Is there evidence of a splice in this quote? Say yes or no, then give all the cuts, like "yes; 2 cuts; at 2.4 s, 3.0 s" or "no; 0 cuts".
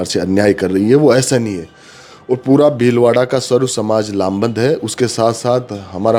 no; 0 cuts